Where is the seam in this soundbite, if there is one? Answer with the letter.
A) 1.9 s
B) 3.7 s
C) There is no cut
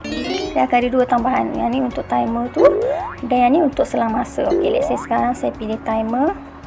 C